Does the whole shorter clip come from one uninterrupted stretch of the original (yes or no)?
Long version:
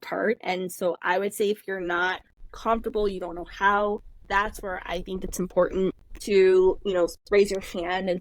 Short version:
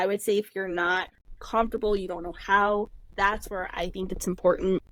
yes